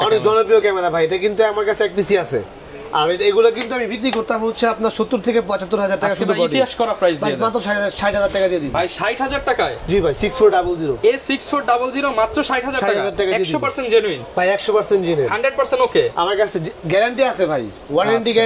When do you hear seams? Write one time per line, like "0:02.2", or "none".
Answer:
none